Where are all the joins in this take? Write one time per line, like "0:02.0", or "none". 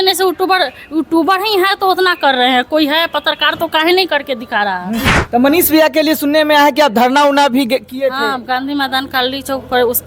0:05.1